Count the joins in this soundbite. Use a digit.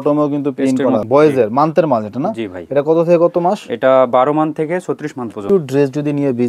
2